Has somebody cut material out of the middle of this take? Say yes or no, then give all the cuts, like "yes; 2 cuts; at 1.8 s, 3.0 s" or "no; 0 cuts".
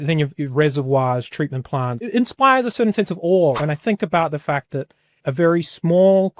yes; 3 cuts; at 2.1 s, 3.6 s, 5.2 s